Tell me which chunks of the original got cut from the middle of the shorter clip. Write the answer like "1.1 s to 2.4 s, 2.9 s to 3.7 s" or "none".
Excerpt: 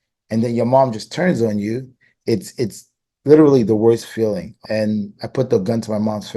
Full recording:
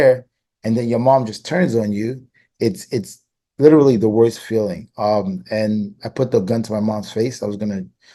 4.9 s to 5.4 s